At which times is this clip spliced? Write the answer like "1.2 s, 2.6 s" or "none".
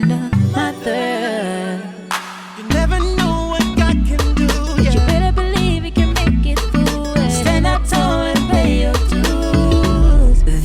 none